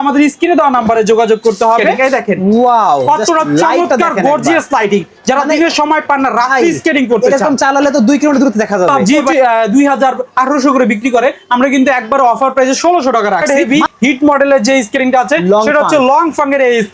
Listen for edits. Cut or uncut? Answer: cut